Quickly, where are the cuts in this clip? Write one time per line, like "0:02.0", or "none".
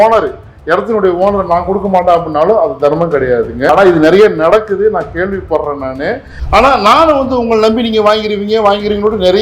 0:03.7
0:06.3